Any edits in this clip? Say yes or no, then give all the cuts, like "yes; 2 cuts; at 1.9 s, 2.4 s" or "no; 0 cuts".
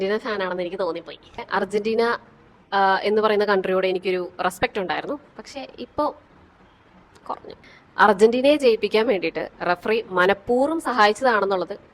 yes; 1 cut; at 1.4 s